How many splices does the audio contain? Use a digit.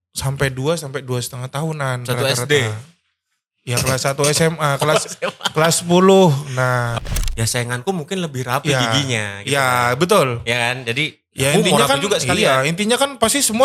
1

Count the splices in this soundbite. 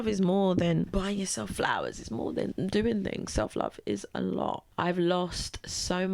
2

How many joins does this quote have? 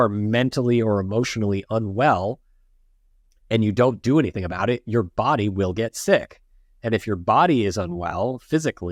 0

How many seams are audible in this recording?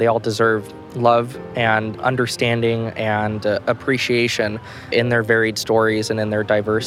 0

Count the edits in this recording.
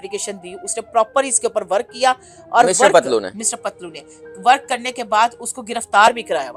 0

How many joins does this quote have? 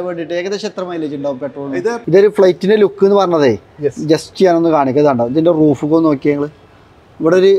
1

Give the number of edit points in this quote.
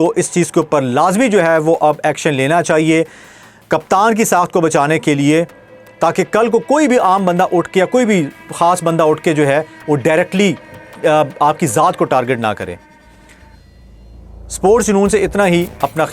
0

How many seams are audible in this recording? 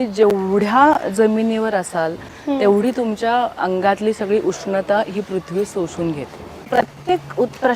2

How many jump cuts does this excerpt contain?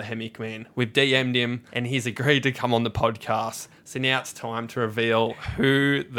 1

